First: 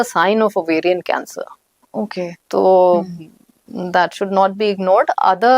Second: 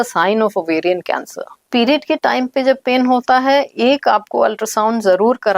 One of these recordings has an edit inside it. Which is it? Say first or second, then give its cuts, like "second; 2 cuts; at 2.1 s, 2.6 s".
second; 1 cut; at 1.7 s